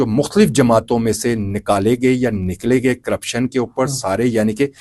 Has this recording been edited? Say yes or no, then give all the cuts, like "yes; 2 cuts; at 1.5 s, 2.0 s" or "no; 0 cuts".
no; 0 cuts